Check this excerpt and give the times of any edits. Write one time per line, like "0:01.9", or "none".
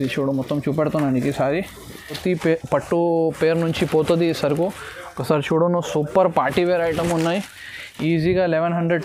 0:02.2